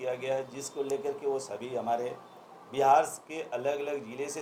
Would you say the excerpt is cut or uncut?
uncut